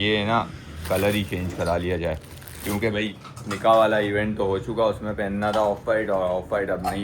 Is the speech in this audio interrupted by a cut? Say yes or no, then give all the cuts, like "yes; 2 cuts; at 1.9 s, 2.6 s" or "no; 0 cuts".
no; 0 cuts